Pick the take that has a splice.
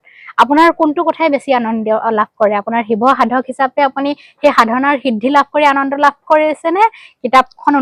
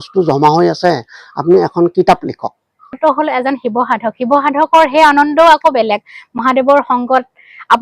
second; 1 cut; at 3.0 s

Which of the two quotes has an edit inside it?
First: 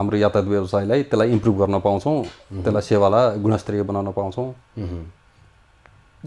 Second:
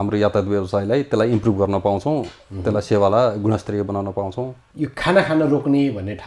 second; 1 cut; at 4.6 s

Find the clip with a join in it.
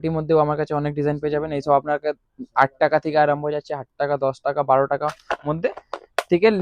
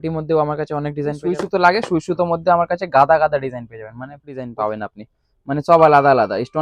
second; 2 cuts; at 1.2 s, 4.5 s

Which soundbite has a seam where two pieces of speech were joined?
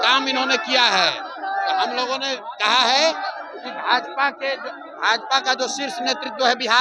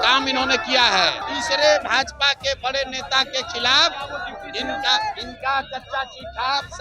second; 1 cut; at 1.2 s

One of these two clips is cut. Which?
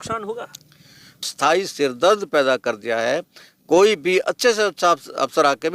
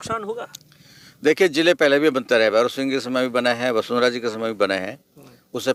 first; 1 cut; at 1.1 s

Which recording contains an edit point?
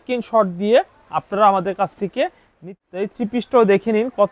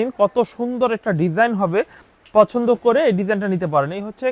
first; 1 cut; at 2.7 s

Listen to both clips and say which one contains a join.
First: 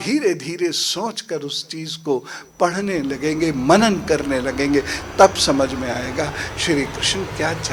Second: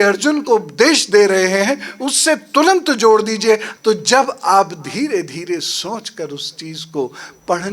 second; 1 cut; at 3.7 s

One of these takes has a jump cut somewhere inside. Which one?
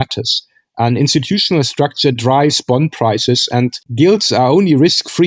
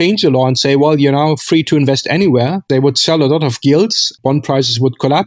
second; 2 cuts; at 2.6 s, 4.1 s

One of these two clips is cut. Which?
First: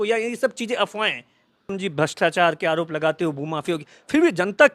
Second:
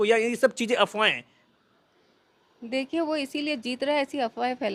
first; 1 cut; at 1.7 s

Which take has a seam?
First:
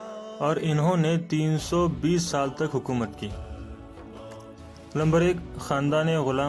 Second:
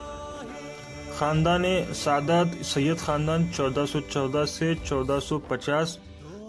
first; 2 cuts; at 3.4 s, 4.9 s

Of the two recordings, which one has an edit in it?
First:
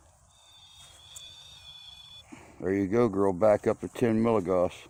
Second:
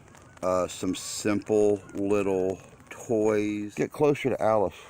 second; 1 cut; at 3.7 s

